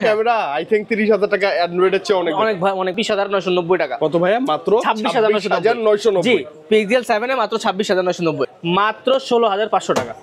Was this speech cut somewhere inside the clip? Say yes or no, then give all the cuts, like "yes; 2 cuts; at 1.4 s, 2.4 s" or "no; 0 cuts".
yes; 2 cuts; at 2.9 s, 8.5 s